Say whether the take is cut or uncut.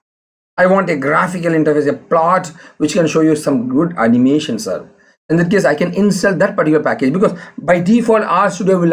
uncut